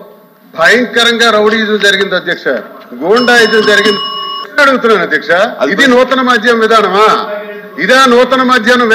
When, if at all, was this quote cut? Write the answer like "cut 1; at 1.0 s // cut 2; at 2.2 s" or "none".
cut 1; at 4.4 s